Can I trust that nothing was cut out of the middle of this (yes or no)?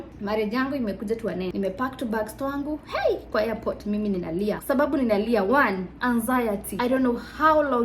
no